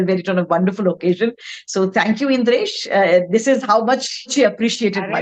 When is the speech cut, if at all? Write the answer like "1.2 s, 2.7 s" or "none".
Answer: 4.3 s